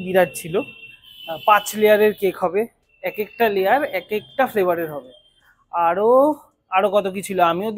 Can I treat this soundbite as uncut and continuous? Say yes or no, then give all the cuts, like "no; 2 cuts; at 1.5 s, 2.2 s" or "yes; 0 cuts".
yes; 0 cuts